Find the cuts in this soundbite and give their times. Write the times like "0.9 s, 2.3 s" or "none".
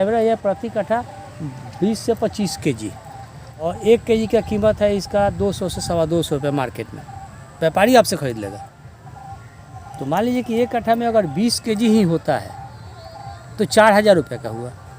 3.7 s